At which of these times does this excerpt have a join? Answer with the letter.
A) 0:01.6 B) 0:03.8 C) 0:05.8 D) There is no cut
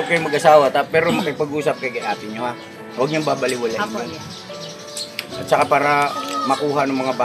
D